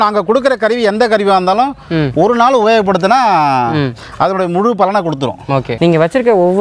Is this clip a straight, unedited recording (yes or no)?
no